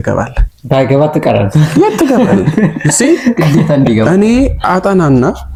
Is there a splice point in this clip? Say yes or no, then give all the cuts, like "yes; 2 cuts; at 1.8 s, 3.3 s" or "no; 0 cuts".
no; 0 cuts